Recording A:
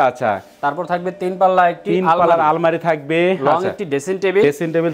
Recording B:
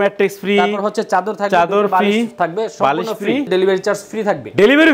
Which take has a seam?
B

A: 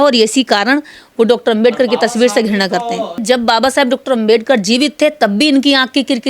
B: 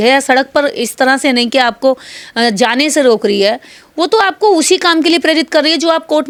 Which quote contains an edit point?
A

